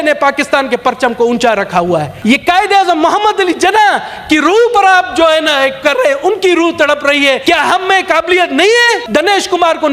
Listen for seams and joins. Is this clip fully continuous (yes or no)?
no